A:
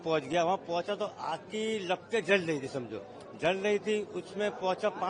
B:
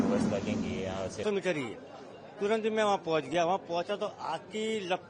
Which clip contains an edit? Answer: B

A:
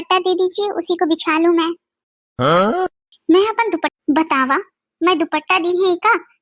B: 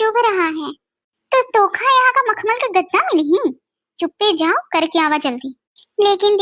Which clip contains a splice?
A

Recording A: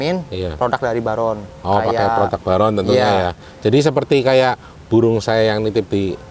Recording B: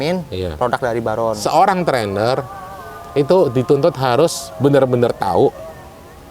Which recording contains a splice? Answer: B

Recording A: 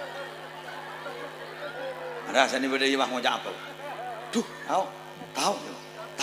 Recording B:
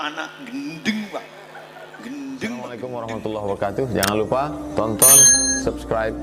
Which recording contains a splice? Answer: B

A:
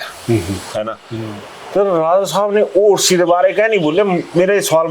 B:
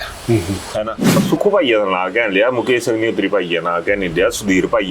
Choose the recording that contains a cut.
B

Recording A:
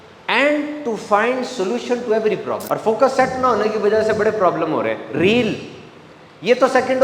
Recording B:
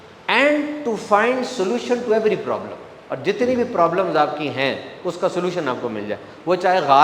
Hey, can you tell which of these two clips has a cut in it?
A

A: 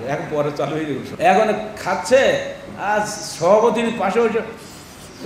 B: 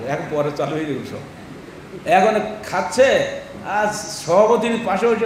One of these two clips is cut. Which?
A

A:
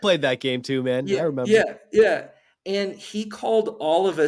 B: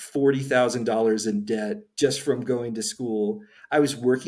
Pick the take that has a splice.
B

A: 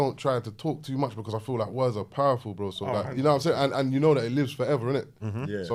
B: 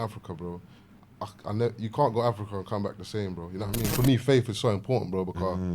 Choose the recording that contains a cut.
B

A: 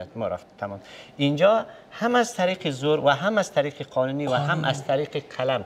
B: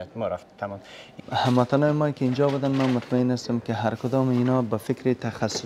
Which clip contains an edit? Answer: B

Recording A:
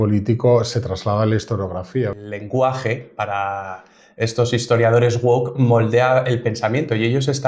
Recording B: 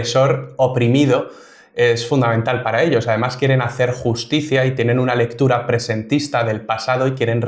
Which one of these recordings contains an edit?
A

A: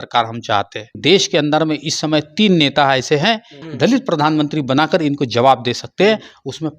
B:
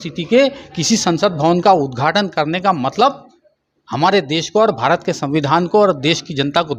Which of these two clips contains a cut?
A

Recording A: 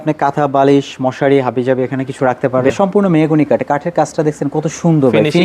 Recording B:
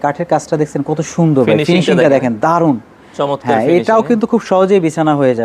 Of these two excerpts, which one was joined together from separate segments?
A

